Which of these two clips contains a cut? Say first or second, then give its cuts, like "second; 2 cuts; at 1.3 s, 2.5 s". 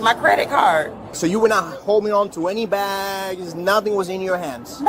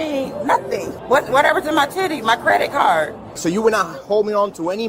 second; 1 cut; at 0.9 s